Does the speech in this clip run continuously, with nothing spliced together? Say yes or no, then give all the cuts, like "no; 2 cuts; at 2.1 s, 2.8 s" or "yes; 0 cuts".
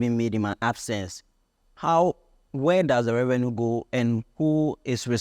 yes; 0 cuts